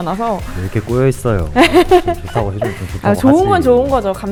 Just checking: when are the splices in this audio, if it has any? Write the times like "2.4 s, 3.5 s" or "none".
none